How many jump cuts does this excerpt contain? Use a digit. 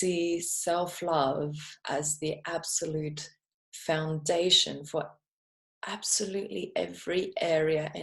0